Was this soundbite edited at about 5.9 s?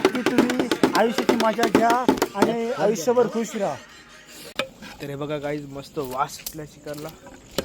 no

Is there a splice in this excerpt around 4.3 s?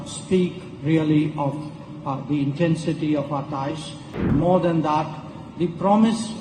yes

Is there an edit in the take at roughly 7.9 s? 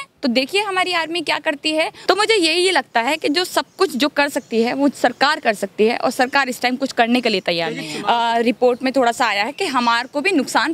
yes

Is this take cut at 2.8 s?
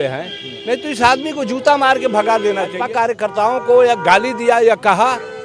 yes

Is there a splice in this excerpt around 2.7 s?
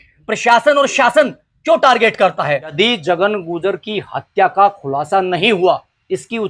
yes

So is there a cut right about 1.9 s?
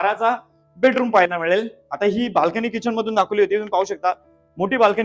no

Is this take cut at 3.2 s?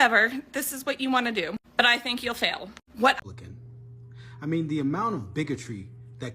yes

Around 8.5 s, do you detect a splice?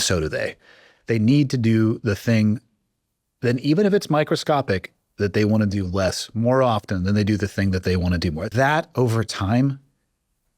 yes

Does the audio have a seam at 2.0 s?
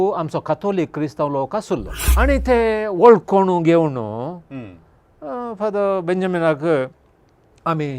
yes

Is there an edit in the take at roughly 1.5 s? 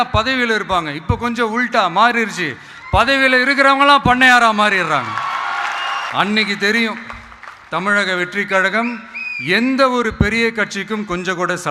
no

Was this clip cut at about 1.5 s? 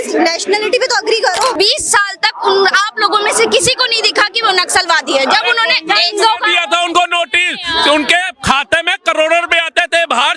yes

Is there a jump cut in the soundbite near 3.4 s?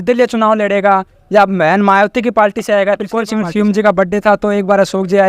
yes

